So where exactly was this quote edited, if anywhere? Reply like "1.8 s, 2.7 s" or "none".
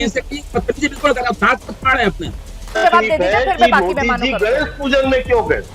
2.8 s